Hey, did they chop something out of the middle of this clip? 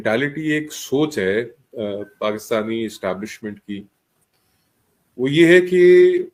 no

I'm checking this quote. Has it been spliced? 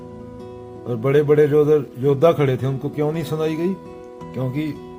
no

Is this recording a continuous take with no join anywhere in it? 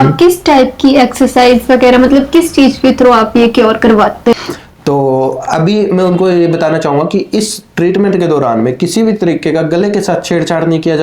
no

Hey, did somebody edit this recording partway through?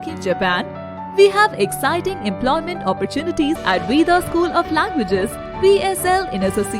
yes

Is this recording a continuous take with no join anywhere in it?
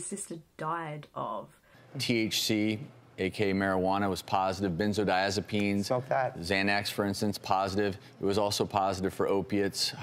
yes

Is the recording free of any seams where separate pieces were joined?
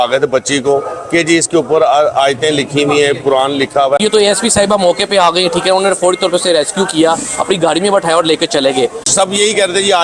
no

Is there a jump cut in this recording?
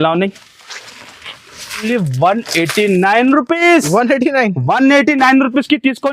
yes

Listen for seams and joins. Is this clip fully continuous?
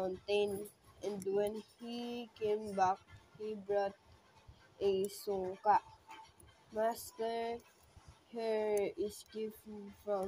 yes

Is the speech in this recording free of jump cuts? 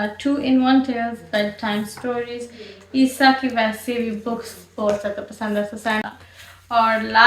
no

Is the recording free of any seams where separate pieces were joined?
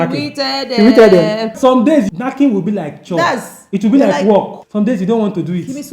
no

